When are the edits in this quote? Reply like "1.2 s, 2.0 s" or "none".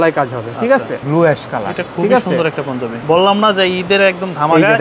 1.0 s, 3.0 s